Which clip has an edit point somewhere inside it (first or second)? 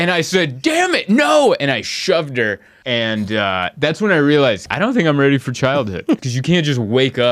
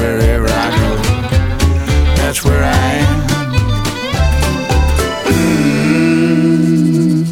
first